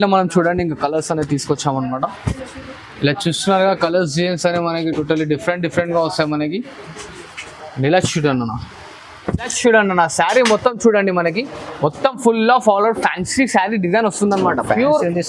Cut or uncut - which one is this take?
cut